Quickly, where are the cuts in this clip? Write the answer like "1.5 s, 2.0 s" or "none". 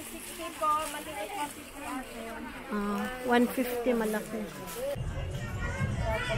5.0 s